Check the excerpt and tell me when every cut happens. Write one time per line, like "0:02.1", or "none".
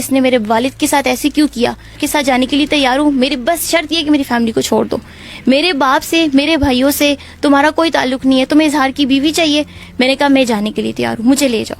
0:02.0